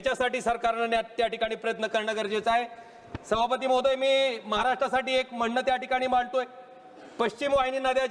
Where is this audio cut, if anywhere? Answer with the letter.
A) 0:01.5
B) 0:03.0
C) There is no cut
C